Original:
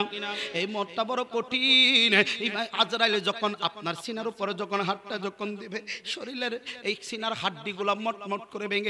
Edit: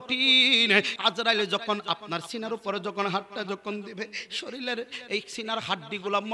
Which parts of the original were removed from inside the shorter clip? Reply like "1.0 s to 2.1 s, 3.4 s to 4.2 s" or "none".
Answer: 2.4 s to 2.7 s